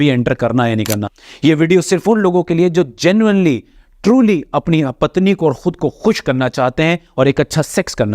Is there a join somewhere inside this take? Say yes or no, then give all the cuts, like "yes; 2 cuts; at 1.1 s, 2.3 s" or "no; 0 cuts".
yes; 1 cut; at 1.2 s